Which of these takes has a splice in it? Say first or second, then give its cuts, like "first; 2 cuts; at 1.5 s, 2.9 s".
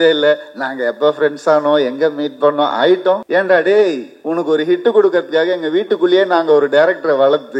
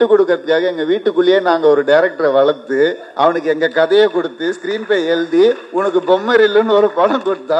first; 1 cut; at 3.2 s